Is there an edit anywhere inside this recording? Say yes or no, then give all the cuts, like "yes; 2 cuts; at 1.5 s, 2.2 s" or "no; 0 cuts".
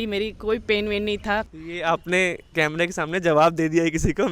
yes; 1 cut; at 1.5 s